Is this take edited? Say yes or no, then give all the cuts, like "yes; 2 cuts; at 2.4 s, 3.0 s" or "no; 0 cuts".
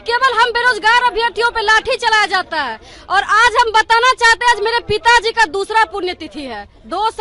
no; 0 cuts